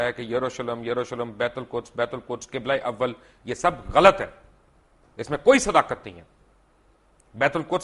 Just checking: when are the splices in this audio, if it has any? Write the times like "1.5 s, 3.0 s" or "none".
none